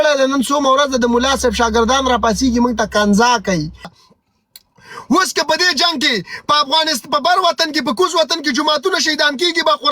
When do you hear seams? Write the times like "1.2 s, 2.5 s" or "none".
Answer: 4.0 s